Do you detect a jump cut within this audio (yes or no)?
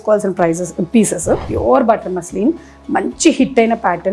yes